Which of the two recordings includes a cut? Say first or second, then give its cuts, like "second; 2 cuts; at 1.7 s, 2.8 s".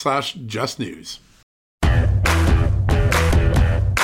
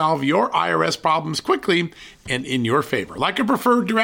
first; 1 cut; at 1.5 s